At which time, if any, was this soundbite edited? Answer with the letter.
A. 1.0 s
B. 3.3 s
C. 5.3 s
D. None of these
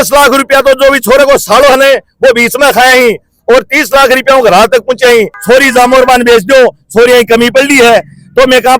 C